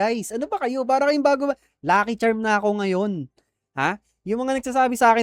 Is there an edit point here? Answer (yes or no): no